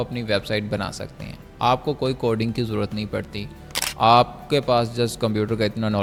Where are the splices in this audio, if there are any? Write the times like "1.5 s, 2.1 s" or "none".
none

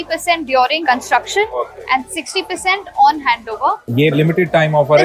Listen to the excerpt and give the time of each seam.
0.8 s, 4.1 s

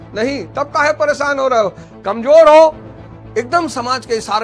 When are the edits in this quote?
1.9 s

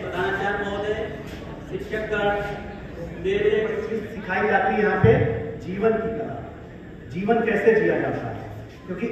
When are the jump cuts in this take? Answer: 3.8 s

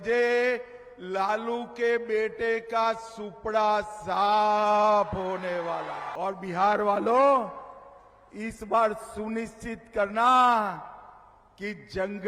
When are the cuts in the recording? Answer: 6.0 s

